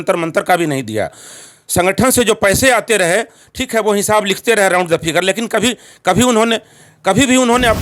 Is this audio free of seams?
yes; 0 cuts

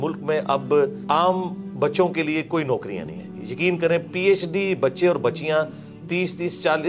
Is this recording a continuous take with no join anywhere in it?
no; 1 cut; at 1.0 s

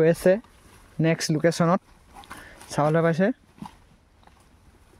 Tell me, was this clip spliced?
no; 0 cuts

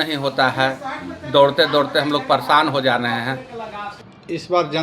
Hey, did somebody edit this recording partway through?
yes; 1 cut; at 3.9 s

